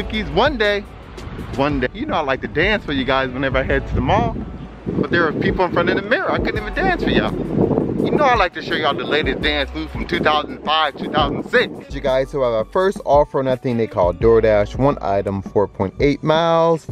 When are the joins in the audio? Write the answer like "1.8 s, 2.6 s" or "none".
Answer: 1.9 s, 12.0 s